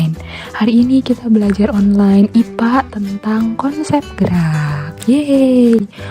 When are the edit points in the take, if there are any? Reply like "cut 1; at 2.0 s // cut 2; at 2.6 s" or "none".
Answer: cut 1; at 2.1 s